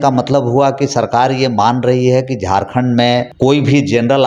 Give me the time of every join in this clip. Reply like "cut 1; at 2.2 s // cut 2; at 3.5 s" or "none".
cut 1; at 3.3 s